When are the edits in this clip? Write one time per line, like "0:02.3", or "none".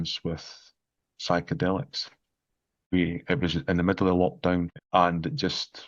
0:02.9
0:04.8